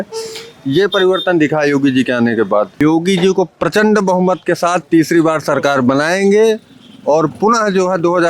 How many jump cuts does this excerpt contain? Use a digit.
1